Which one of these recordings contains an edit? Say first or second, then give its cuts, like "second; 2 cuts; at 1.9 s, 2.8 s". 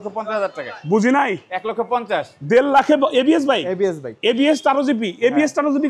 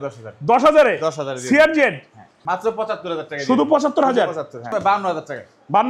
second; 2 cuts; at 2.4 s, 4.7 s